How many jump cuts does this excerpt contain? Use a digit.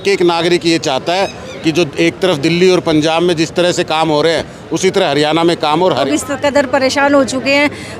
1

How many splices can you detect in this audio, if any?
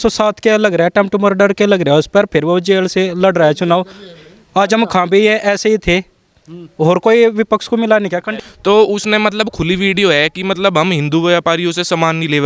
1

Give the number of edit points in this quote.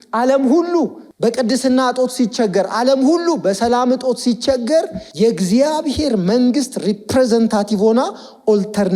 2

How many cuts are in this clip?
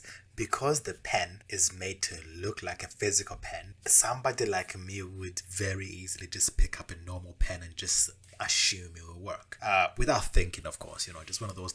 3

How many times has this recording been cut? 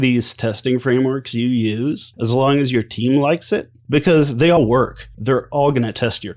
3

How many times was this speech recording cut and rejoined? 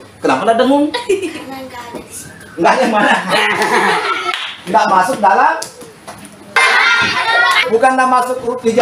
2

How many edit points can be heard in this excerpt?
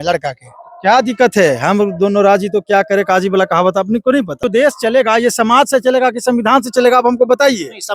1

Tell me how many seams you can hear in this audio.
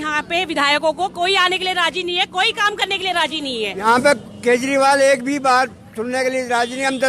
1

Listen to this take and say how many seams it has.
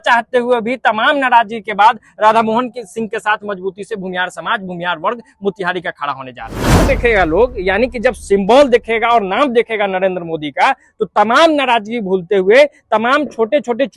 1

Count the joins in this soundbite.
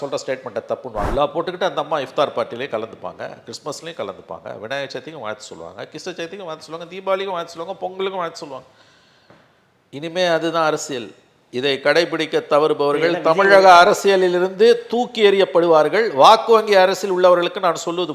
1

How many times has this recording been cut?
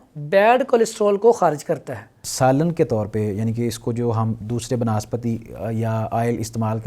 1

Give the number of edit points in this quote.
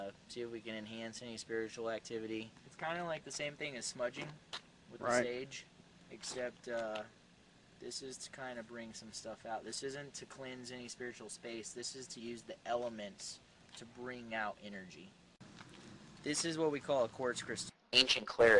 1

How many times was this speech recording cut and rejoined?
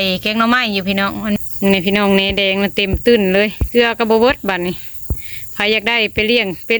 1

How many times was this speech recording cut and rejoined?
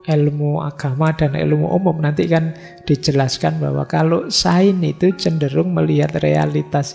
0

